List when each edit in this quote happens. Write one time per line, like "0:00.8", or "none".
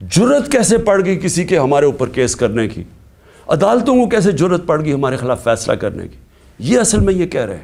none